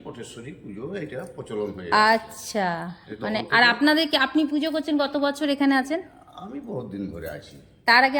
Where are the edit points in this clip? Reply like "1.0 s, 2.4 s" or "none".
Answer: none